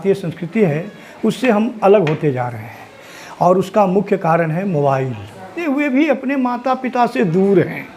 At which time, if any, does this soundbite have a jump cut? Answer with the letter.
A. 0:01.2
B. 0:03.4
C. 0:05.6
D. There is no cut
C